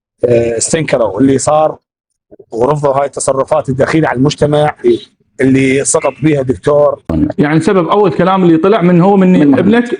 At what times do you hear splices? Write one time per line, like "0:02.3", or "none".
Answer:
0:07.0